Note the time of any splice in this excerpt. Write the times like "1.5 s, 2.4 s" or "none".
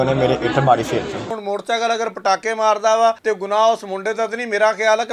1.3 s, 3.2 s